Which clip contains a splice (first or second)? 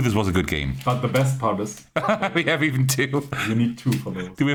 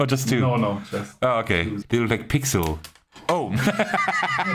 second